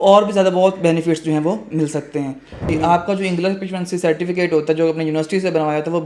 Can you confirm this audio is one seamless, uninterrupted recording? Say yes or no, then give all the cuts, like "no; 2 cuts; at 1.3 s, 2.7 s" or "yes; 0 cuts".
no; 1 cut; at 2.7 s